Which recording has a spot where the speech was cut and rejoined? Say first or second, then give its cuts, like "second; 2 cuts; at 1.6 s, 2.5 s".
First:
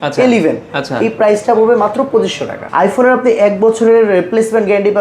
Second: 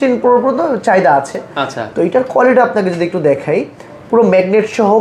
first; 1 cut; at 2.6 s